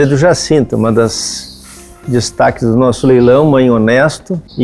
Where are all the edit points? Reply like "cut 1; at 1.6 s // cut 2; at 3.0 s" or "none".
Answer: none